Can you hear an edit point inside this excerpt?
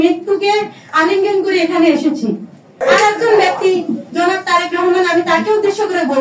yes; 1 cut; at 2.8 s

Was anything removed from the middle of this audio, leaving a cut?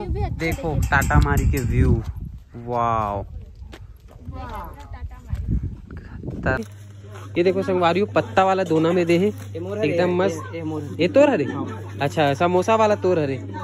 yes; 1 cut; at 6.6 s

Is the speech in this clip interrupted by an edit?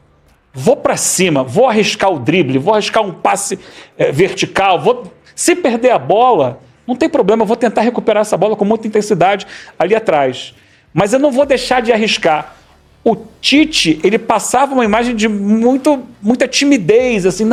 no; 0 cuts

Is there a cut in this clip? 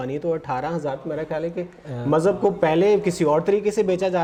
no; 0 cuts

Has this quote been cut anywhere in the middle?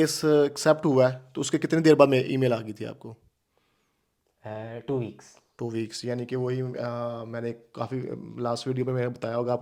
no; 0 cuts

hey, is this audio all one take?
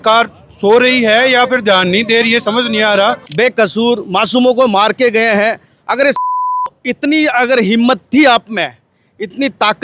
no; 1 cut; at 3.2 s

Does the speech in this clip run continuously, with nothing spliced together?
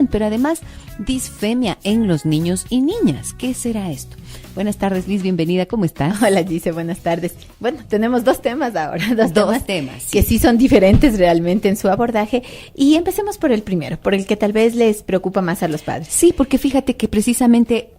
no; 1 cut; at 6.4 s

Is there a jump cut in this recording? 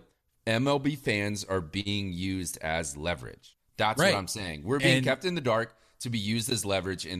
no; 0 cuts

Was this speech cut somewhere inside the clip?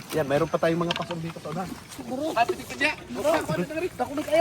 yes; 1 cut; at 2.0 s

